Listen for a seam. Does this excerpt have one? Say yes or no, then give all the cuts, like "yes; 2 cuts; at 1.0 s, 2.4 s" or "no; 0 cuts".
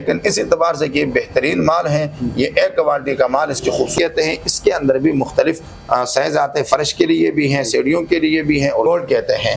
yes; 2 cuts; at 3.9 s, 8.9 s